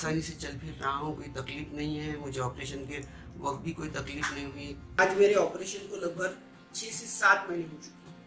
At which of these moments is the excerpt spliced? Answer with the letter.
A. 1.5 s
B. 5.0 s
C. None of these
B